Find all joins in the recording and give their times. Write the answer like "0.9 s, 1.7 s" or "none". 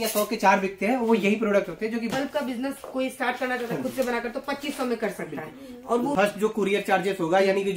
2.1 s, 6.1 s